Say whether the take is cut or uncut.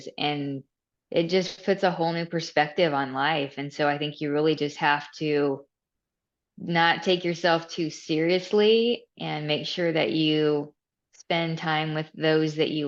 uncut